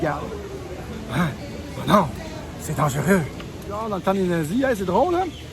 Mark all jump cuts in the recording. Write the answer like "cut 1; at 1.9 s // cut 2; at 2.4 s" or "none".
cut 1; at 3.8 s